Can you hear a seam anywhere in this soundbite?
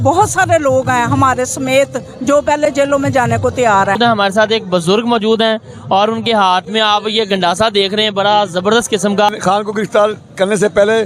yes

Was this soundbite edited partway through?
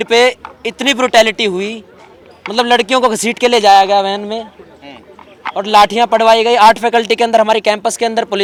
no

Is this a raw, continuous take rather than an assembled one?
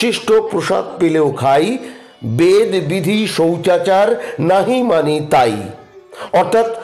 yes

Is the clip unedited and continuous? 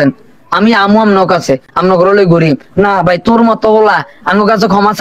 no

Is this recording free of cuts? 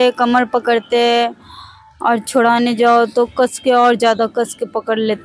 yes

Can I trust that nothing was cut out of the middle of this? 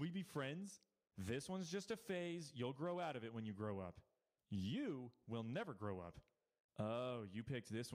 yes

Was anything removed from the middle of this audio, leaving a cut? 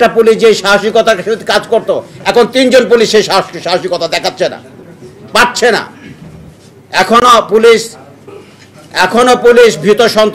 no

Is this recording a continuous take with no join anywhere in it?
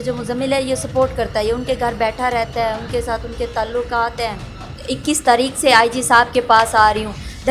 no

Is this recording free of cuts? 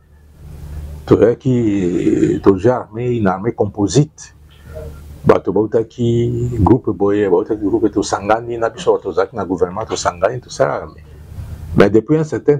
yes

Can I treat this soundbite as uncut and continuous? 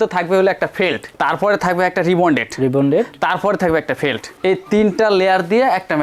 yes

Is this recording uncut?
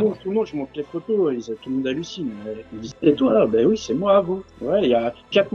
yes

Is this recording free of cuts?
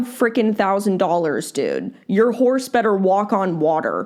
yes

